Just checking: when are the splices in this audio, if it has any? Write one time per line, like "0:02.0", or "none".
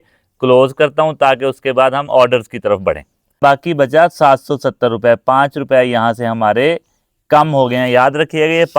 0:03.4